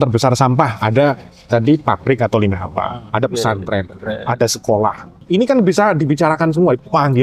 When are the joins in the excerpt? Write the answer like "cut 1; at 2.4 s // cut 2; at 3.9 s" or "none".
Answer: cut 1; at 5.1 s